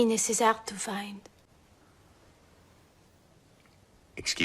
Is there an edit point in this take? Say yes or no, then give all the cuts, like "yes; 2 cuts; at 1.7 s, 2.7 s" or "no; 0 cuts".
no; 0 cuts